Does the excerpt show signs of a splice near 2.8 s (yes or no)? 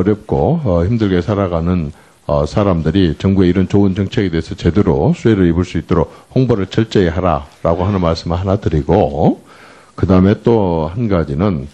yes